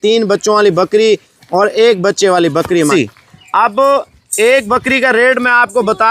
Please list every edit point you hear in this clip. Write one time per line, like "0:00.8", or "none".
0:02.9